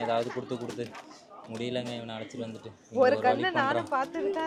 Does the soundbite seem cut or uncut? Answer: uncut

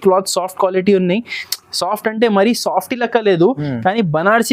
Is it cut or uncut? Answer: uncut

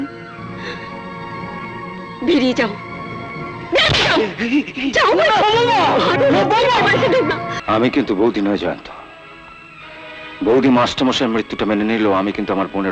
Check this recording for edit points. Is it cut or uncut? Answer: cut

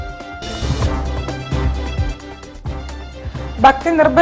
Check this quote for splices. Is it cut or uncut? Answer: cut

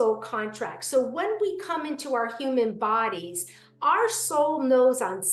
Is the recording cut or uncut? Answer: uncut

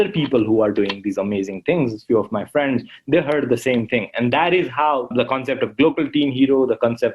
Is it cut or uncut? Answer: cut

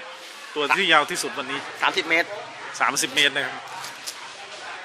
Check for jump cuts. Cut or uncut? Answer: uncut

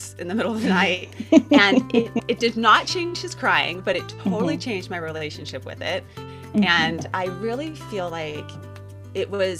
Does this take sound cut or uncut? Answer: uncut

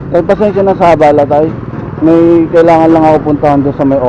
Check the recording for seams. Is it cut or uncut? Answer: uncut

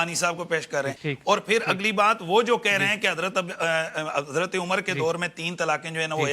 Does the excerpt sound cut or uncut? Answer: cut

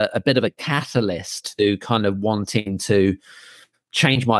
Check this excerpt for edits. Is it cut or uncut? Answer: uncut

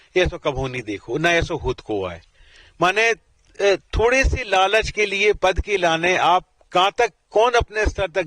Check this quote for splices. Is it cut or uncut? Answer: uncut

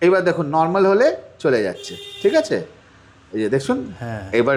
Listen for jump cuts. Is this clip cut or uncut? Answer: uncut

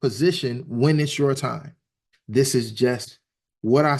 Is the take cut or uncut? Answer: cut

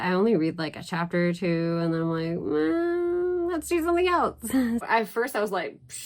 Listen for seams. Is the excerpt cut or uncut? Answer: cut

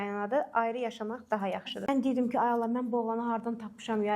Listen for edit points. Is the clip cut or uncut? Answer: cut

